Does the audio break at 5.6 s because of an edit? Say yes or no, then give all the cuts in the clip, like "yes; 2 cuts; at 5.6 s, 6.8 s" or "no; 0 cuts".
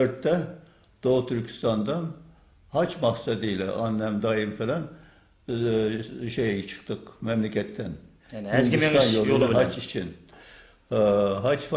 yes; 1 cut; at 5.6 s